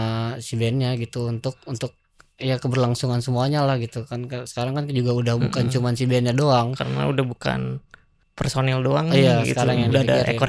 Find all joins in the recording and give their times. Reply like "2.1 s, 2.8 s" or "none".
none